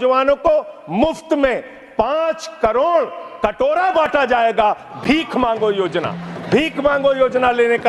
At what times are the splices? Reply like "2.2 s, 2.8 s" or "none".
none